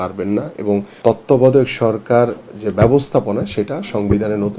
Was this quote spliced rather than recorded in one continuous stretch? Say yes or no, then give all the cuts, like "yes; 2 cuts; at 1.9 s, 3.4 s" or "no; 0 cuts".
yes; 1 cut; at 0.9 s